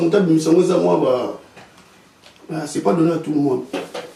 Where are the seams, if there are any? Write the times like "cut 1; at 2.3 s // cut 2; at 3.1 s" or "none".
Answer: none